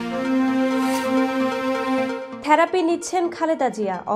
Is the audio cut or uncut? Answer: cut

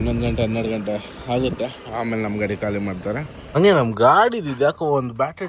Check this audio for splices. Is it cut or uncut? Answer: cut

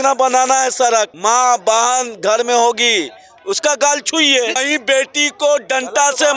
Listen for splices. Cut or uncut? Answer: cut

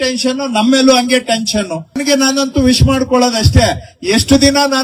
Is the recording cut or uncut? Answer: cut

